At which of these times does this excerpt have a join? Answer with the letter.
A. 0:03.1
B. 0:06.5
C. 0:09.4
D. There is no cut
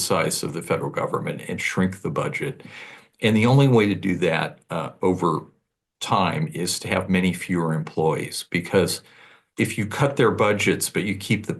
C